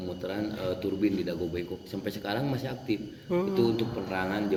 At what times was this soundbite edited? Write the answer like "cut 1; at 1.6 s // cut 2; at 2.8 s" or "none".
none